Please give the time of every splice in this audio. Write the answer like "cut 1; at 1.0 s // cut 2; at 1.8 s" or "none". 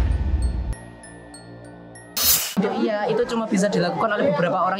cut 1; at 2.6 s